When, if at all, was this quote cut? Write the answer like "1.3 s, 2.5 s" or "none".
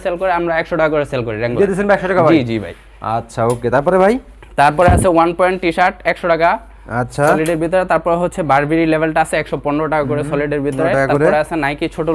none